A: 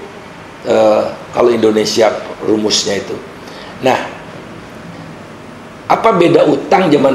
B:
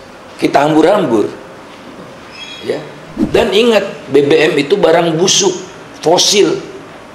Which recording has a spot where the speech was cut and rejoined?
B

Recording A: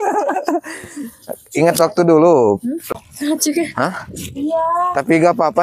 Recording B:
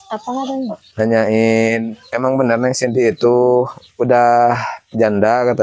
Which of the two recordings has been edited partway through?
A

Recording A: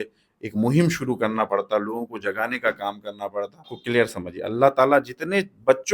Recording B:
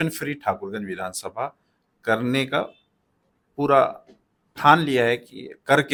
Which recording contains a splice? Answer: A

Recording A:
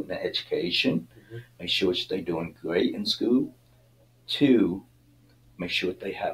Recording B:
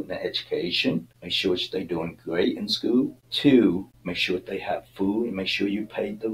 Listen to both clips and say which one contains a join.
B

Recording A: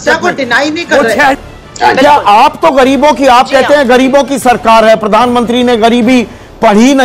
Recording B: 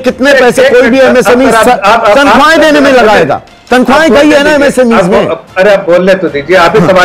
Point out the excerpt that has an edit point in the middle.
A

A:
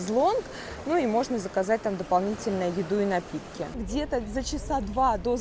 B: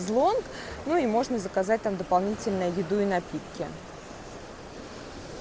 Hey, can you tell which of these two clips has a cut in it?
A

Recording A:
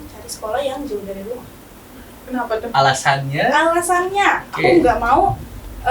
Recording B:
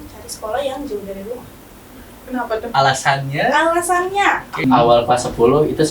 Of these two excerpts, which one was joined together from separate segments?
B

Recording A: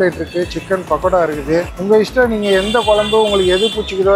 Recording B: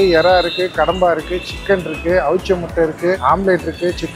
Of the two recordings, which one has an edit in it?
A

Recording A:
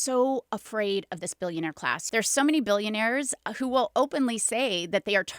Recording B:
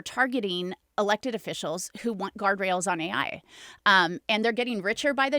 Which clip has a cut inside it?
A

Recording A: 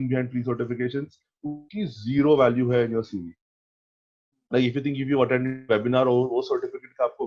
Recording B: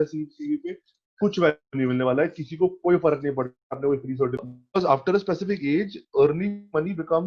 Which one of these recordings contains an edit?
B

